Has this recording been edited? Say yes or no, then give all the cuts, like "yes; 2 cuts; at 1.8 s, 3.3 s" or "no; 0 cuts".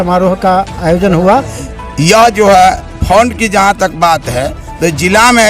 yes; 1 cut; at 1.5 s